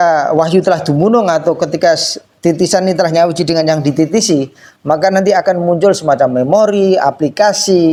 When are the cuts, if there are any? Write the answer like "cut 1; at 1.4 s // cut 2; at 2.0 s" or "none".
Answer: none